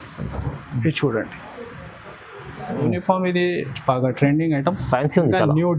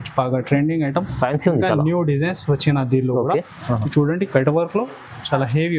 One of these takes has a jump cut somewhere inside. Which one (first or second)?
first